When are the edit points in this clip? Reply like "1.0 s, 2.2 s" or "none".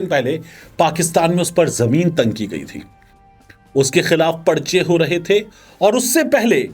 none